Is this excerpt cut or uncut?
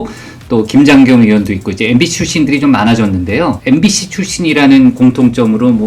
cut